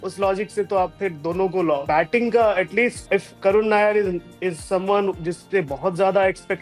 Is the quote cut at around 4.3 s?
no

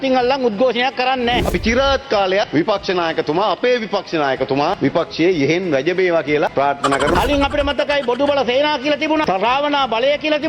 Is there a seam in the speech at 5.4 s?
no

